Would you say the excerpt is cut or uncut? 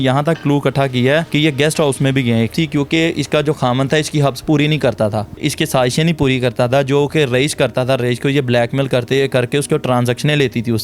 cut